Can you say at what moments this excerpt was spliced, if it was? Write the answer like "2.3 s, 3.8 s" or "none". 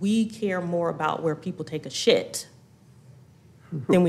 none